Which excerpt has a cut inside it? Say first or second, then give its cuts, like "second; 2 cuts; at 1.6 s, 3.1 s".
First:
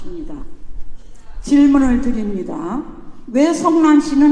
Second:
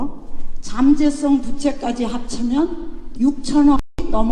first; 1 cut; at 1.4 s